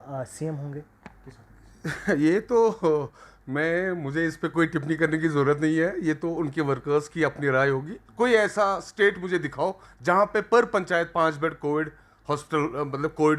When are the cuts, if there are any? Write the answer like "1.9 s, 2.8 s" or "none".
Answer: 8.0 s